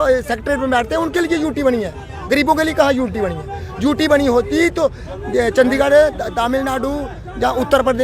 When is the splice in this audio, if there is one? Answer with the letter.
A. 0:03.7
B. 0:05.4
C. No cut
C